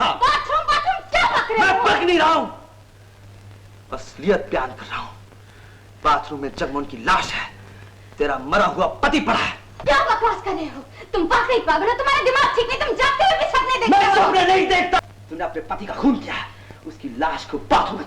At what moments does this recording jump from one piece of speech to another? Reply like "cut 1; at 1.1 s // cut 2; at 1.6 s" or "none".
cut 1; at 15.0 s